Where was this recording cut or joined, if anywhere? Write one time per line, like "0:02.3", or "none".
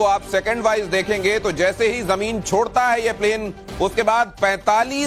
none